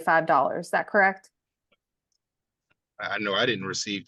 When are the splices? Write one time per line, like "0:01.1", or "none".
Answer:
none